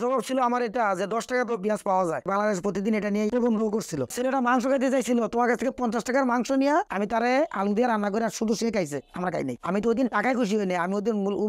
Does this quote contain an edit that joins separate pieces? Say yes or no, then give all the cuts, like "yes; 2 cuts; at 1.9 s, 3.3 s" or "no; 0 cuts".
yes; 3 cuts; at 2.3 s, 4.1 s, 9.6 s